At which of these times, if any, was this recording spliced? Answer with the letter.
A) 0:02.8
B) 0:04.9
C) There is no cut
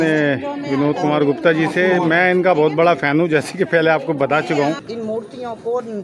B